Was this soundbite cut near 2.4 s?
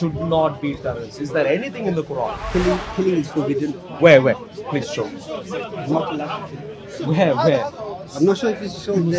yes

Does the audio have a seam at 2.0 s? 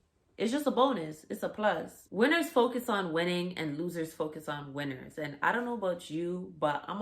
yes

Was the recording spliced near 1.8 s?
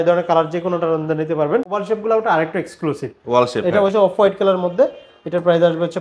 yes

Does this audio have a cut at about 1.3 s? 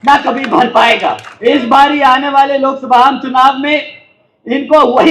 yes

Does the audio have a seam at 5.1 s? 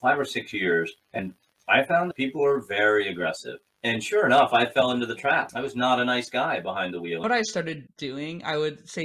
no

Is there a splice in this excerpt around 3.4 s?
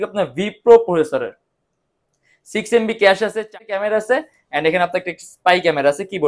yes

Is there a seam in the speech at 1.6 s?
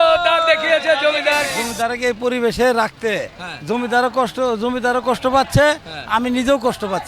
yes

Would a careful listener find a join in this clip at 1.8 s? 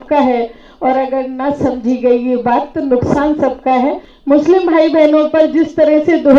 no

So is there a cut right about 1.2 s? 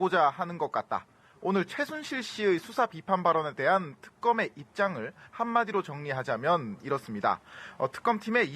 no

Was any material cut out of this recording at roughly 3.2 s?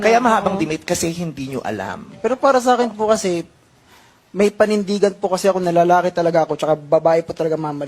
yes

